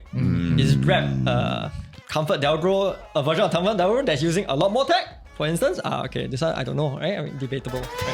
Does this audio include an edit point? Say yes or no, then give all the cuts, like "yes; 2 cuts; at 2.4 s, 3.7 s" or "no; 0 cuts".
no; 0 cuts